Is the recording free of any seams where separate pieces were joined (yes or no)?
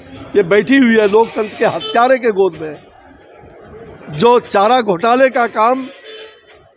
yes